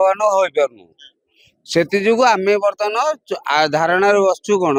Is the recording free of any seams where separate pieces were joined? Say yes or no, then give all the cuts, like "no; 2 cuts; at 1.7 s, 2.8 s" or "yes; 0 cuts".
yes; 0 cuts